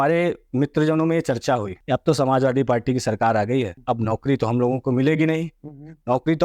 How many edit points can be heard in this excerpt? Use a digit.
2